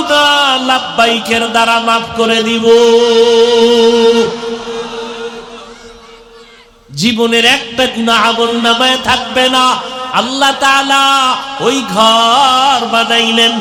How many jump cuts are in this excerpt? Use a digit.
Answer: 0